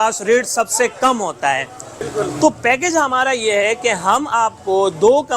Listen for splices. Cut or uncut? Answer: cut